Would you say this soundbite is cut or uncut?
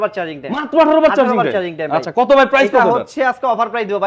uncut